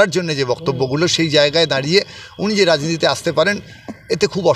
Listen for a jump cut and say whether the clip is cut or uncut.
uncut